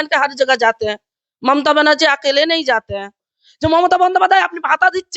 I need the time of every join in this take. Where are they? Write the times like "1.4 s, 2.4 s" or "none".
3.3 s